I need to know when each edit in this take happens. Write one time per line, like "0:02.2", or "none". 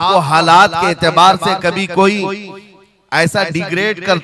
none